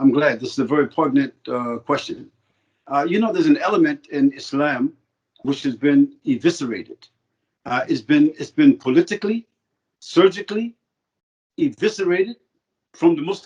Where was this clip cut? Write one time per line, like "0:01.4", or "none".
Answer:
0:05.4